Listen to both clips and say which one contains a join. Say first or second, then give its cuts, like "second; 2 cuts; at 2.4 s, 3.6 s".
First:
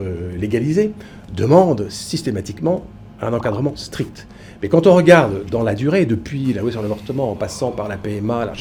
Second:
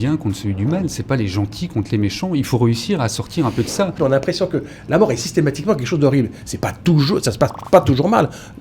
second; 1 cut; at 4.0 s